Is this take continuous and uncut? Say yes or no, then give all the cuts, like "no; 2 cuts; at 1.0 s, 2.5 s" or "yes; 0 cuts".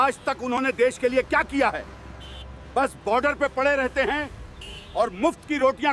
yes; 0 cuts